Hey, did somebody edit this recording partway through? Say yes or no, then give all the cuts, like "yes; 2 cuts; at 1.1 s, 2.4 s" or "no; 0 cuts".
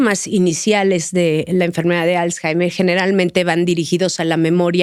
no; 0 cuts